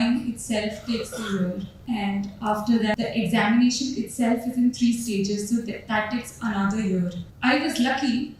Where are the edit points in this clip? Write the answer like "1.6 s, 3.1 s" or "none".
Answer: 1.7 s, 3.0 s, 7.2 s

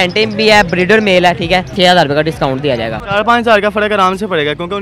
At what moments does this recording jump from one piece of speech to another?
1.7 s, 3.0 s

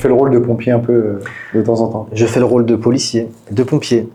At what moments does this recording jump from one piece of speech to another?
none

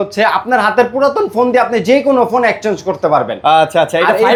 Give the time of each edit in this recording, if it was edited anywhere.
none

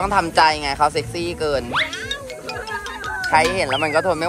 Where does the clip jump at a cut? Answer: none

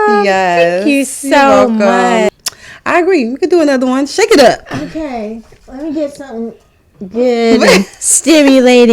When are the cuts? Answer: 2.3 s

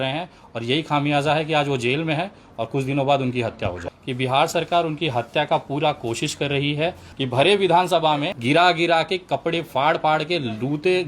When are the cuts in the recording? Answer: 3.9 s, 7.1 s, 8.3 s

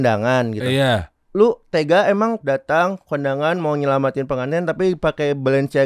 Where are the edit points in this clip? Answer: 1.2 s, 2.4 s

